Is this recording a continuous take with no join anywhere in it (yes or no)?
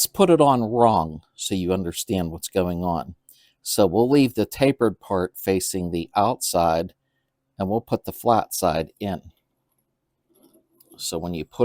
no